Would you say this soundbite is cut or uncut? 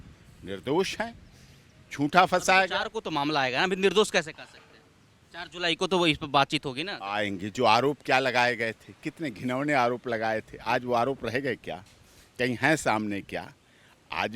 uncut